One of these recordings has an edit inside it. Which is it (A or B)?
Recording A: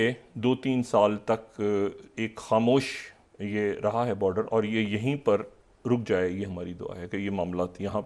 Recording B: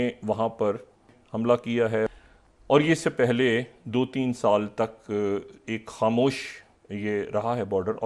B